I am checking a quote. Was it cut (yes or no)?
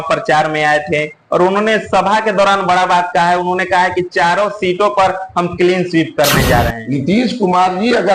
yes